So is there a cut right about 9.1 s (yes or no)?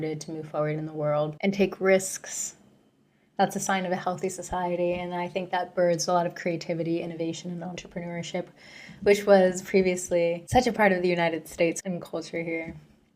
no